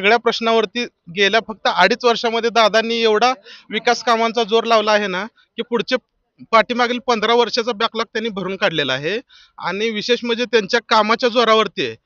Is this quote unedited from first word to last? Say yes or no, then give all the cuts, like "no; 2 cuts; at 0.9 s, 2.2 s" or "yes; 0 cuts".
yes; 0 cuts